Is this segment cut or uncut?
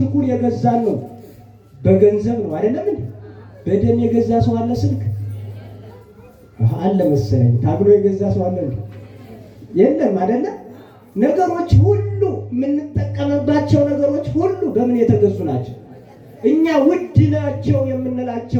uncut